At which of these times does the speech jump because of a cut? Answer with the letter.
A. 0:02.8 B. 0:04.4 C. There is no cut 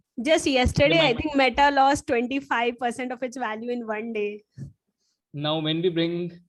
C